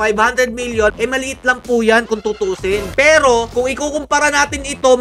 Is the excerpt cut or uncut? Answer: cut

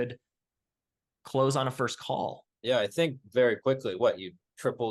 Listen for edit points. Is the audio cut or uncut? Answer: cut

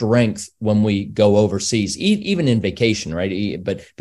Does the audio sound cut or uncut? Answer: uncut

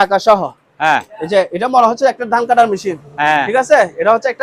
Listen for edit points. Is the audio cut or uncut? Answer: uncut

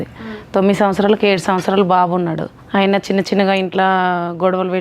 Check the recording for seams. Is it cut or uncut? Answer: cut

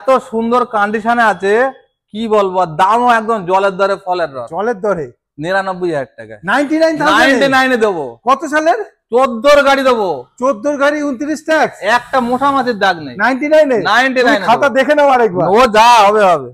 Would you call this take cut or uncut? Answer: uncut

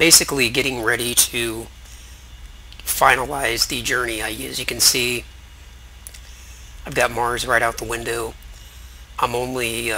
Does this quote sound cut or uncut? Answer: uncut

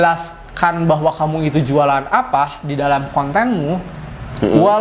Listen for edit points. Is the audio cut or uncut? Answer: uncut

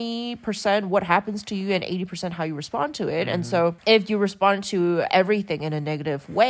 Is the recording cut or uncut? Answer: cut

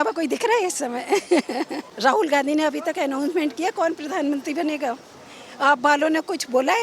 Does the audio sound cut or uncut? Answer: cut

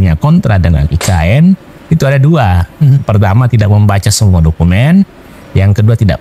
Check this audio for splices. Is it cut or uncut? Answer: uncut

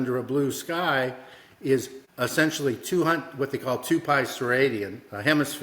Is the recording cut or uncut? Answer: cut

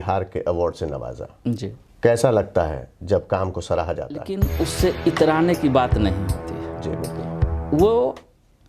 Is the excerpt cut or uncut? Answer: cut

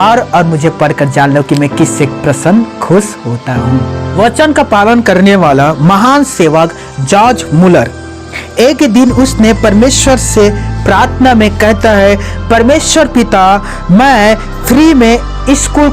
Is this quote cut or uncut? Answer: cut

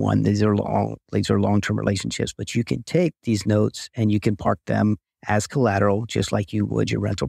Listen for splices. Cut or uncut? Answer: uncut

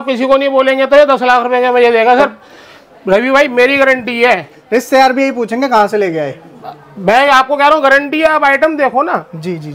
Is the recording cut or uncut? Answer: uncut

